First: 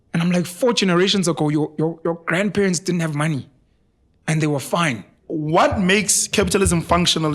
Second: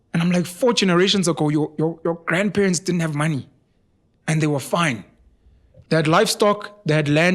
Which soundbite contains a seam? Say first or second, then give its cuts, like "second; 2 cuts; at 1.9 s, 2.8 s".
first; 1 cut; at 5.2 s